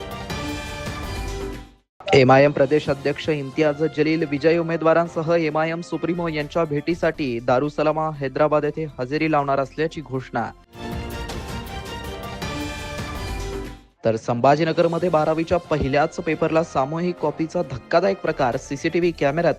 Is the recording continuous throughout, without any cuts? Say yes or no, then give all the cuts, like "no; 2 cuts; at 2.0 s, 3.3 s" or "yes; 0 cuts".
no; 1 cut; at 1.2 s